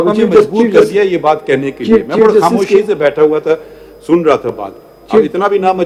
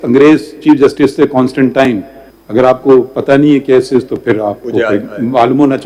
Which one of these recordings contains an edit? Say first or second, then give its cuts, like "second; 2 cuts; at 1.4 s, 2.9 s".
second; 1 cut; at 2.1 s